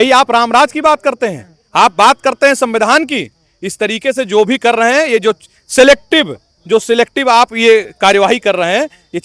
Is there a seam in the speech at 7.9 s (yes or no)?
no